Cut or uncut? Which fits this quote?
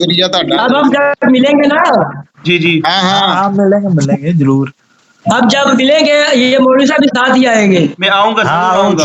uncut